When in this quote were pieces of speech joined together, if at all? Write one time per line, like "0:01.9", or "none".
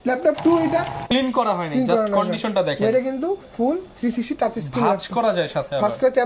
0:01.0

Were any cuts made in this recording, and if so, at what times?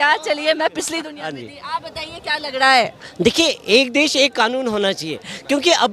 none

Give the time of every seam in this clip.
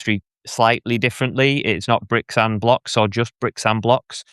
none

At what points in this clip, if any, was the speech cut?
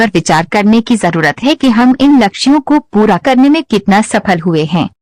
none

